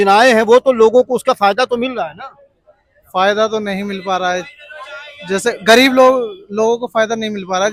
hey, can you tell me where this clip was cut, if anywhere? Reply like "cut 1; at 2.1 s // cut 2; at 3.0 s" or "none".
none